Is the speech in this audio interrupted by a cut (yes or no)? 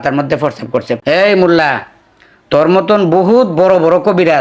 yes